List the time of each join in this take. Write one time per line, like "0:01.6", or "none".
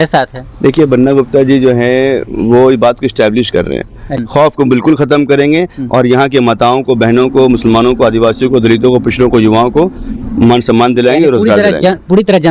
0:04.1